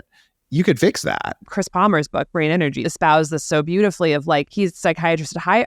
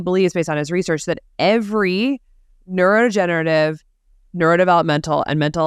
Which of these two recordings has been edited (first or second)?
first